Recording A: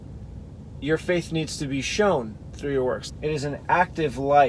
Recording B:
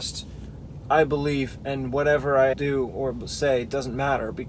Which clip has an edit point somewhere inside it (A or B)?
A